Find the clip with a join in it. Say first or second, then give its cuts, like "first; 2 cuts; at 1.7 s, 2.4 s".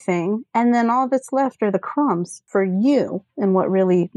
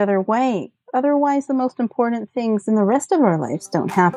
first; 1 cut; at 2.3 s